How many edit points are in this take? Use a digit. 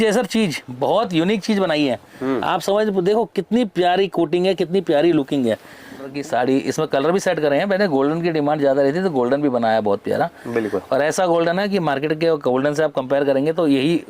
1